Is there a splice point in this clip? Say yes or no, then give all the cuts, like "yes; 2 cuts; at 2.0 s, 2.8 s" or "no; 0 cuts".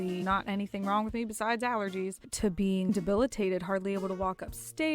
yes; 1 cut; at 2.9 s